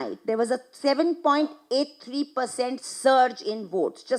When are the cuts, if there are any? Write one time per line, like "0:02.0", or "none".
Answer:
none